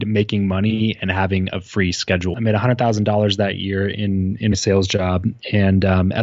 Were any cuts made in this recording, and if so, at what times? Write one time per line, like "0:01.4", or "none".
0:02.3